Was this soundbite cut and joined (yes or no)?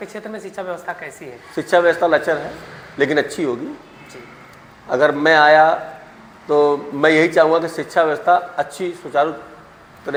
no